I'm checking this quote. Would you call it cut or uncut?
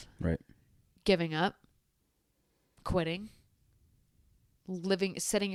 uncut